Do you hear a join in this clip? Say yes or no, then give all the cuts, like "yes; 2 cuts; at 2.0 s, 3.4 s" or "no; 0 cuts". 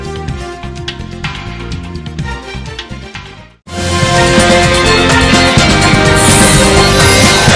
yes; 1 cut; at 6.3 s